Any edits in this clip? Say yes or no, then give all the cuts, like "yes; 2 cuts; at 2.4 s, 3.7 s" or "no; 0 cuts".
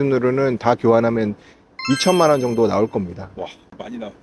no; 0 cuts